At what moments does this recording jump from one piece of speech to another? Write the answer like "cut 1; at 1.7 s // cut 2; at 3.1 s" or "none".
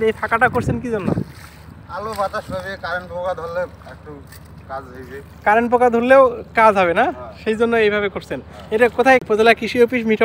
cut 1; at 9.0 s